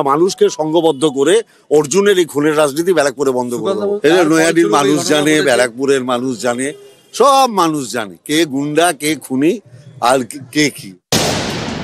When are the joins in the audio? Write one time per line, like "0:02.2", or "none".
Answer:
none